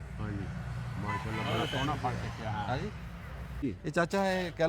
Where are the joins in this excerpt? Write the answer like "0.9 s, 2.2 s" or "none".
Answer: 3.6 s